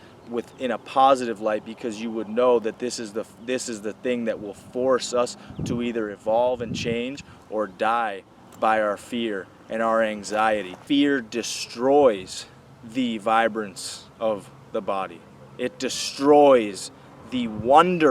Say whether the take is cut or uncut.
cut